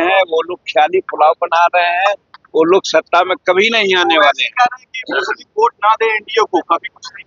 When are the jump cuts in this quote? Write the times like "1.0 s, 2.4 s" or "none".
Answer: none